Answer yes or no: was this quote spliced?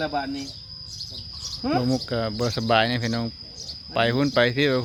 no